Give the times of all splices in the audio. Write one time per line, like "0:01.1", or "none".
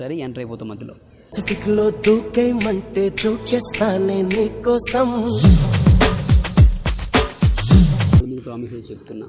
0:08.2